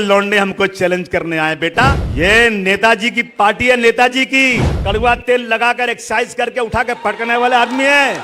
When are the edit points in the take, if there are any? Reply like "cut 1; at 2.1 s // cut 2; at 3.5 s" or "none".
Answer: cut 1; at 2.0 s // cut 2; at 4.7 s